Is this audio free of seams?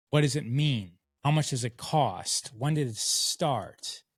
yes; 0 cuts

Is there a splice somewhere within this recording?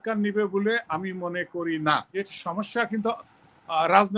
yes; 1 cut; at 2.1 s

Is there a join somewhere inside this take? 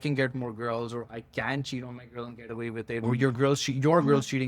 no; 0 cuts

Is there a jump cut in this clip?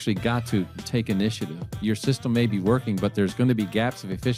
no; 0 cuts

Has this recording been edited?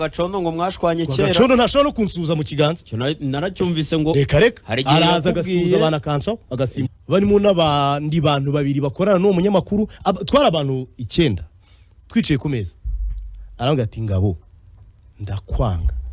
yes; 1 cut; at 6.8 s

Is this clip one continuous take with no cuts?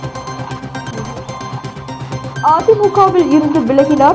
no; 1 cut; at 2.2 s

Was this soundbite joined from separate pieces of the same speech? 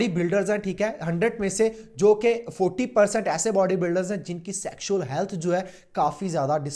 no; 0 cuts

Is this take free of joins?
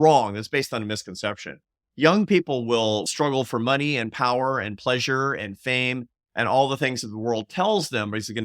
no; 1 cut; at 3.1 s

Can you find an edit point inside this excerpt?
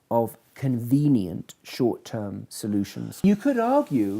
yes; 1 cut; at 3.2 s

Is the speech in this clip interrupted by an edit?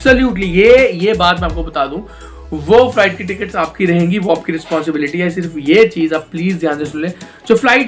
no; 0 cuts

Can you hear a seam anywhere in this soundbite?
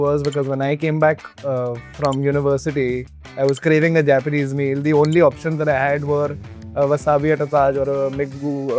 no; 0 cuts

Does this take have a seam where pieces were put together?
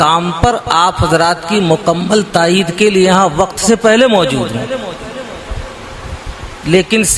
no; 0 cuts

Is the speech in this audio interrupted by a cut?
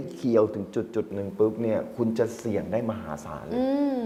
no; 0 cuts

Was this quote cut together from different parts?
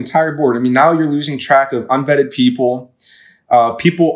no; 0 cuts

